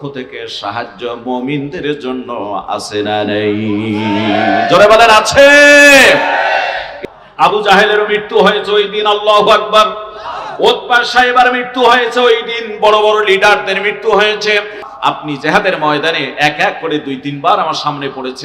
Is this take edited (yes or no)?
yes